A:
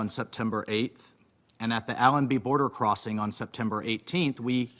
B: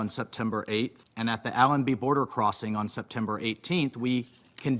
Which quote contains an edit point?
B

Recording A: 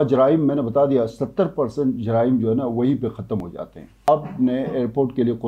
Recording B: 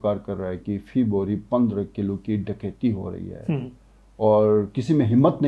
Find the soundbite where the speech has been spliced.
A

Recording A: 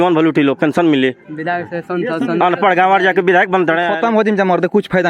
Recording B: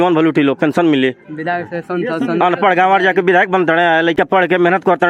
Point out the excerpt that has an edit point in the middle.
A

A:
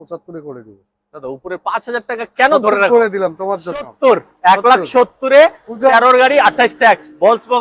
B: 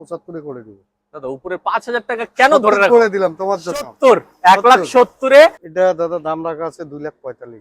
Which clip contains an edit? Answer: B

